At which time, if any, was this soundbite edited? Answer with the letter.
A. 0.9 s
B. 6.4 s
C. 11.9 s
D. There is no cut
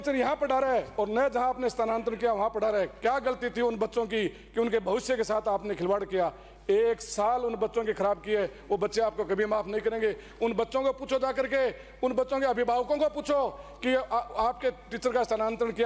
D